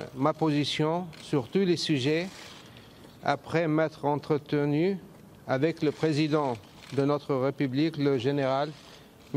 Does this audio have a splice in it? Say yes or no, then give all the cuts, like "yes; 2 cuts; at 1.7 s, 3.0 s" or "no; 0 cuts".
no; 0 cuts